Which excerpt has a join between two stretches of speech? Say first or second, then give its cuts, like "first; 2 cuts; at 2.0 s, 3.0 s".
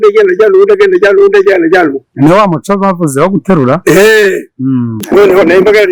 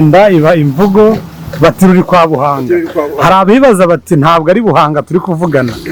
first; 1 cut; at 5.0 s